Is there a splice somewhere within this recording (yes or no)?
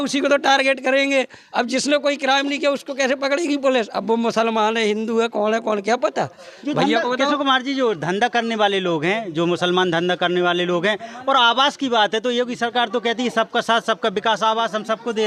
no